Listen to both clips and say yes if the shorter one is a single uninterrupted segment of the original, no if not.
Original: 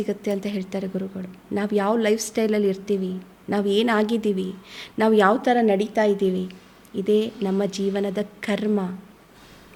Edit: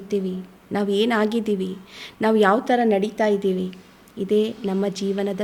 yes